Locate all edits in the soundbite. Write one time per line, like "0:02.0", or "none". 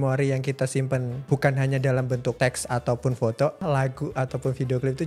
0:01.1
0:02.4
0:03.6